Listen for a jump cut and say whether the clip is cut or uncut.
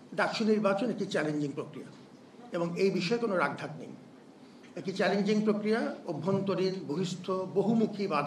uncut